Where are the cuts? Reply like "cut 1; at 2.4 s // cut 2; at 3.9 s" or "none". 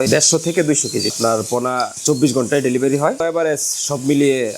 cut 1; at 1.2 s // cut 2; at 3.2 s